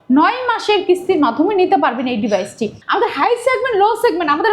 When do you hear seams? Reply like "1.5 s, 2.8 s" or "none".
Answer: 2.8 s